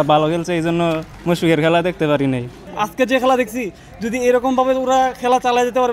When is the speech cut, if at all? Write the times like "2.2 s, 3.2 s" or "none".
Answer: 1.1 s, 2.7 s